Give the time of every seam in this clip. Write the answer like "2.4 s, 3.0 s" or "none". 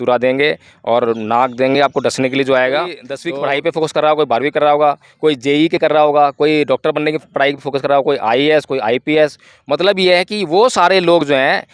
3.1 s